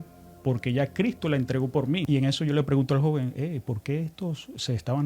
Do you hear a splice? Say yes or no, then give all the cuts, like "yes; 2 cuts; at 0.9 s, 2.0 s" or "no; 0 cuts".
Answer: yes; 1 cut; at 2.0 s